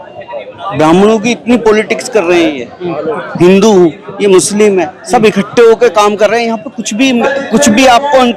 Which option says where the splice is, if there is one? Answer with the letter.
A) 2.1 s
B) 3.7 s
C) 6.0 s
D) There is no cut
D